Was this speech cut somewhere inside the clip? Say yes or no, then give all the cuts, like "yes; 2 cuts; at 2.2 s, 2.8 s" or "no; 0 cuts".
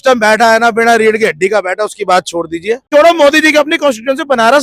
yes; 1 cut; at 2.8 s